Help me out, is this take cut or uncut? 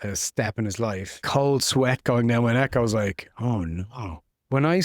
cut